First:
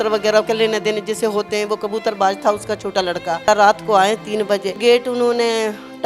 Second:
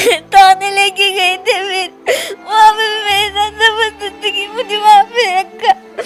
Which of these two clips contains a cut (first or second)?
first